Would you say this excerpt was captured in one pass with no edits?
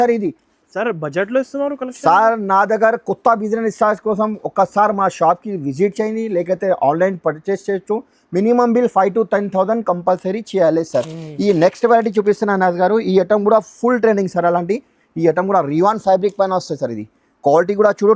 yes; 0 cuts

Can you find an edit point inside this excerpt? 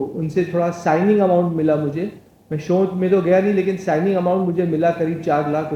no; 0 cuts

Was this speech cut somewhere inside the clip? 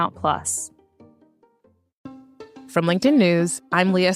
yes; 1 cut; at 2.0 s

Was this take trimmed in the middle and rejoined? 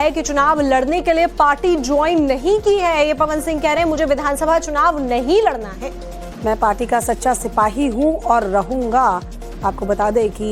yes; 1 cut; at 8.3 s

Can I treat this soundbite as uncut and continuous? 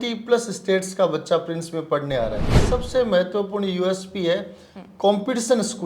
no; 1 cut; at 2.5 s

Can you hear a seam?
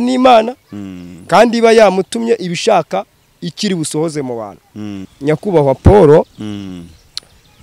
yes; 1 cut; at 5.0 s

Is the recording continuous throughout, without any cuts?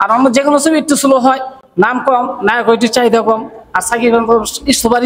yes; 0 cuts

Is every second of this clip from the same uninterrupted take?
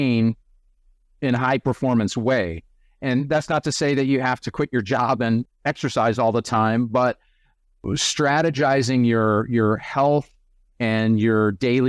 no; 2 cuts; at 5.4 s, 7.8 s

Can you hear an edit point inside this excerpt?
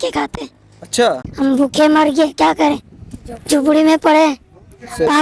yes; 1 cut; at 1.2 s

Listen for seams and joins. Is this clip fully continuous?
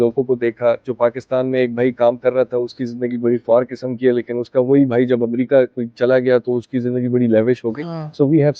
yes; 0 cuts

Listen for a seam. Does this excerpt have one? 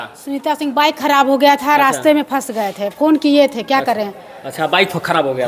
no; 0 cuts

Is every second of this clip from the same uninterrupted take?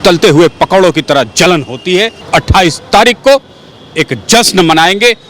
no; 1 cut; at 2.2 s

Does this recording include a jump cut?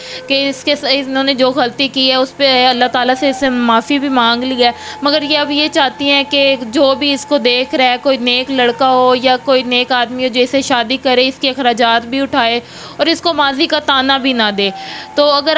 no; 0 cuts

